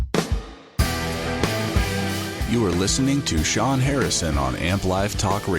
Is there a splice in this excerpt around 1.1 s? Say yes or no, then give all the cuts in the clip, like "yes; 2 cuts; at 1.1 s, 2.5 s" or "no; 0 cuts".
yes; 1 cut; at 1.1 s